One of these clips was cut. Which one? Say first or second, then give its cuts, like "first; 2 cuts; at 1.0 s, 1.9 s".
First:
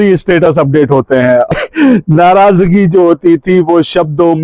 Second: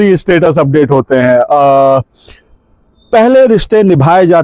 first; 1 cut; at 1.5 s